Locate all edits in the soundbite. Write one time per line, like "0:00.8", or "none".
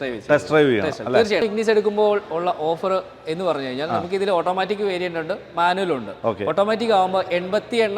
0:01.4